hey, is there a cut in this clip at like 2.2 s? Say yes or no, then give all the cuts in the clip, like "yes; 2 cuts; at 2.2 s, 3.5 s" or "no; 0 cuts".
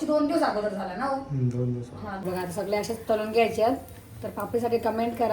yes; 1 cut; at 2.2 s